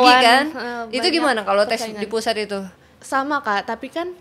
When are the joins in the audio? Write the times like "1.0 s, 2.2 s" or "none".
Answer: 2.9 s